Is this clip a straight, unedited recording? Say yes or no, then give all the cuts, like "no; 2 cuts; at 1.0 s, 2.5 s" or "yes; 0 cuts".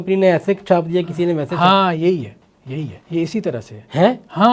no; 1 cut; at 3.0 s